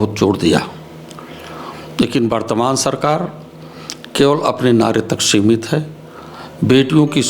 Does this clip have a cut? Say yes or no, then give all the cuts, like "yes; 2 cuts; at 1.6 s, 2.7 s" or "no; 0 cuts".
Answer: no; 0 cuts